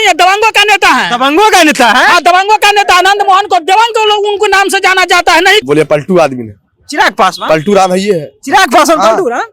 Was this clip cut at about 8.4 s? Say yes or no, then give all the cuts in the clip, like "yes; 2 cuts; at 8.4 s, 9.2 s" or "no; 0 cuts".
no; 1 cut; at 5.6 s